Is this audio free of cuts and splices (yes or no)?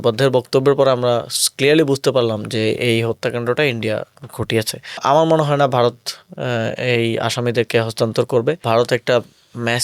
no